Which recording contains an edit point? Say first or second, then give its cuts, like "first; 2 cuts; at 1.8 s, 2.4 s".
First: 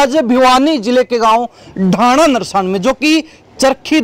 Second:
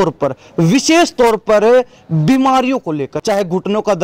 second; 1 cut; at 3.1 s